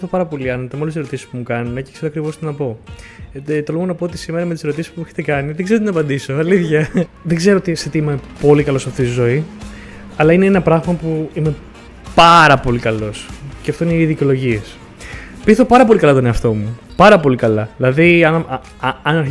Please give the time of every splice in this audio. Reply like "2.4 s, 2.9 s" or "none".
7.2 s